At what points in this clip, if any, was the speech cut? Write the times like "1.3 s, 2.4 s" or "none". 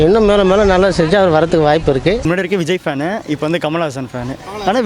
2.2 s

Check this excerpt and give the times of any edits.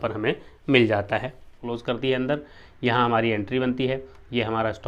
1.6 s

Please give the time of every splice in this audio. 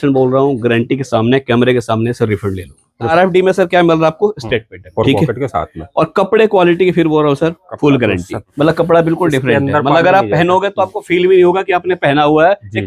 3.1 s, 4.8 s, 8.4 s

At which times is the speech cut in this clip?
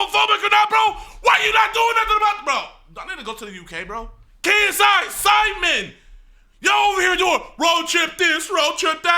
4.2 s

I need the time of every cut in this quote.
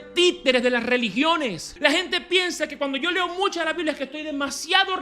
1.7 s

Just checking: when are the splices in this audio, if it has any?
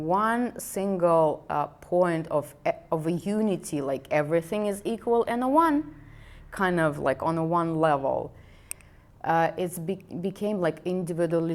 none

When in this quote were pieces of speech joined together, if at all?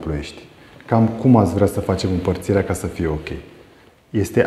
none

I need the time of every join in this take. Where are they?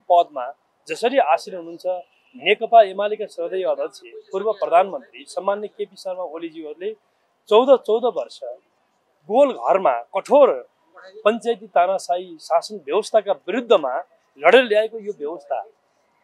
none

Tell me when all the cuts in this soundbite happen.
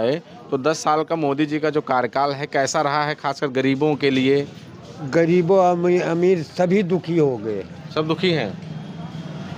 none

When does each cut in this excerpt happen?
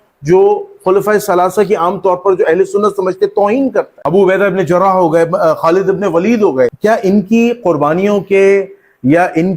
3.9 s, 6.8 s

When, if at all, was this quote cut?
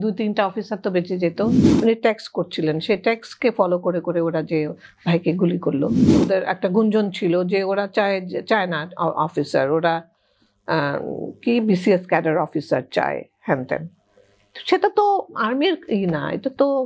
1.7 s, 6.1 s

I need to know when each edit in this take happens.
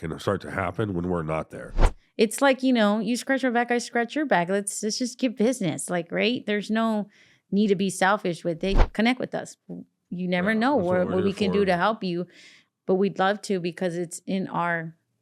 1.9 s, 8.8 s

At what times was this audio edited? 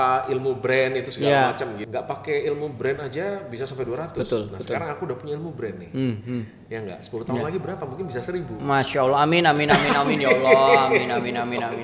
1.8 s

